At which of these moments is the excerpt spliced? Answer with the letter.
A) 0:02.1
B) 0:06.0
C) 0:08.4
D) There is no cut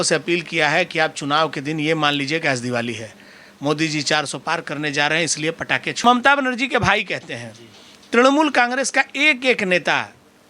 B